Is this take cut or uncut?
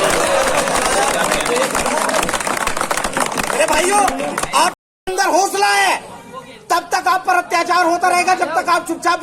cut